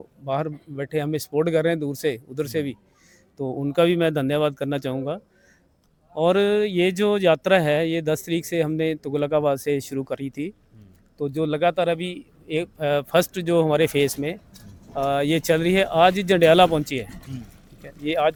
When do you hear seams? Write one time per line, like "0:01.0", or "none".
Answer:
none